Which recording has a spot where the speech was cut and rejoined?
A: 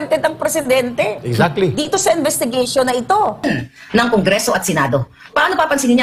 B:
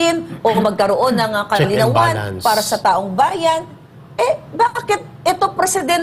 A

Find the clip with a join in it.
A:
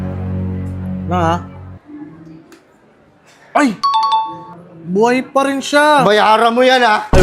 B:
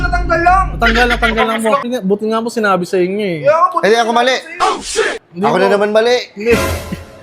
B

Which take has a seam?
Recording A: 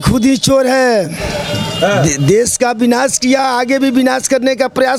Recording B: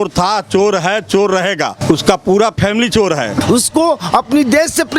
B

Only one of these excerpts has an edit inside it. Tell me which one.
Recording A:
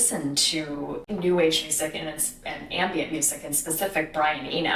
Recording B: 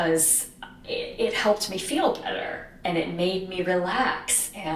A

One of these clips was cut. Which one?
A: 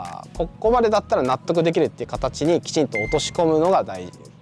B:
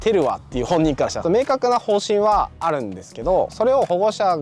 B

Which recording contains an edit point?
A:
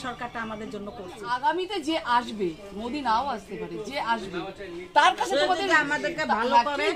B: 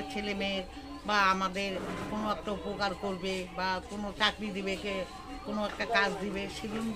A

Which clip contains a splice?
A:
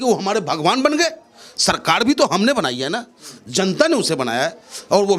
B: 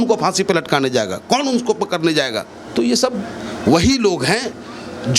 B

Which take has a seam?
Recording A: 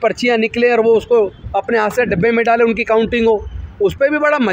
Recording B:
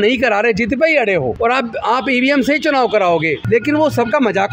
B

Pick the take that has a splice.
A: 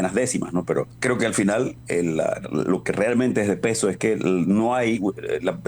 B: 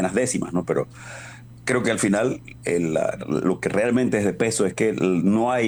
A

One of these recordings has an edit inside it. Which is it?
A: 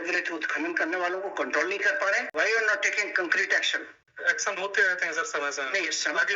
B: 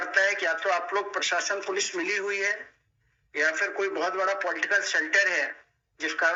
A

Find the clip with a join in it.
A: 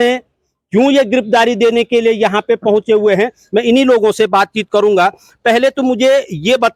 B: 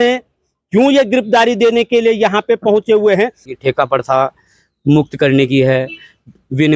B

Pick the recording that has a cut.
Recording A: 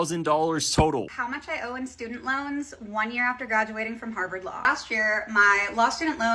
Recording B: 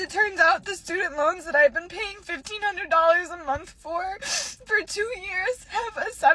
A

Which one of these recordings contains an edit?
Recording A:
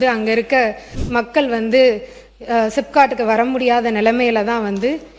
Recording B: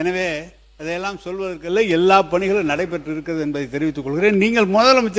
A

